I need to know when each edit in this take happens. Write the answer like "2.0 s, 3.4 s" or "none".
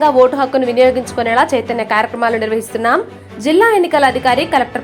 none